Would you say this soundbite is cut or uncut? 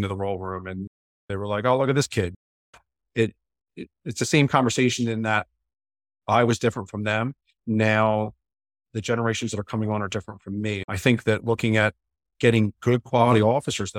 cut